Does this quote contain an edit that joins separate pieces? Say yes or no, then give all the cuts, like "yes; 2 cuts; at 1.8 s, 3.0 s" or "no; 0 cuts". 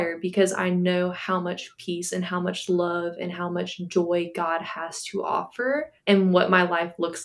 no; 0 cuts